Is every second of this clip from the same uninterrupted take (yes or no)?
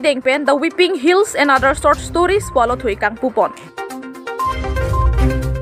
yes